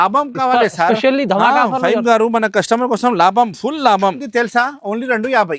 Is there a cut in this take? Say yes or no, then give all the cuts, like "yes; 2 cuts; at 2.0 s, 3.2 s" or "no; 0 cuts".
yes; 1 cut; at 4.2 s